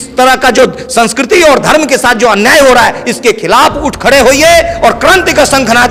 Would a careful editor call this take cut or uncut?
uncut